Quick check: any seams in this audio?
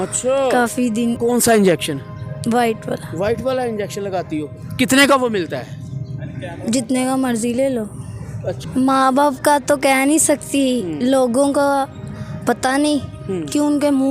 yes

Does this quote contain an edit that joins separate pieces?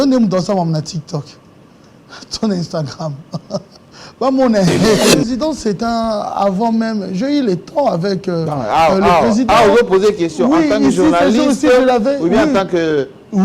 yes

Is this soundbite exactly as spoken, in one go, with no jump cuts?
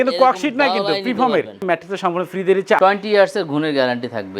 no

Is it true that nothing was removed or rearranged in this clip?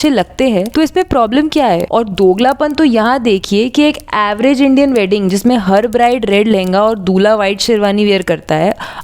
no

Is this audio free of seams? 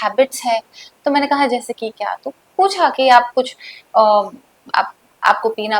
yes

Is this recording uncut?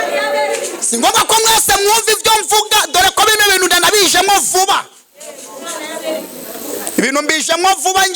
yes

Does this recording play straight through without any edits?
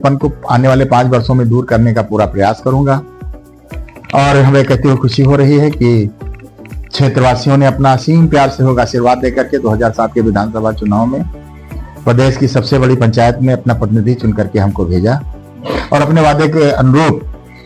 yes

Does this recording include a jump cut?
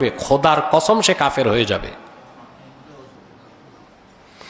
no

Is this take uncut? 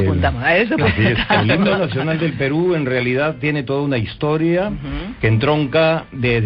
yes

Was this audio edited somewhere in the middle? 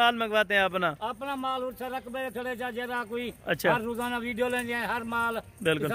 no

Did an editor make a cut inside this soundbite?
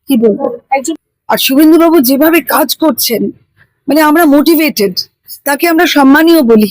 yes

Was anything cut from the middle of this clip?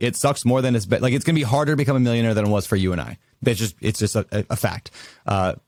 no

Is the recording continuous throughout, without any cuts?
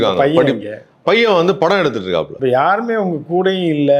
no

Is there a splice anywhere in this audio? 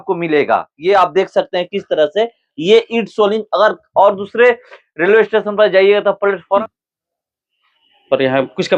yes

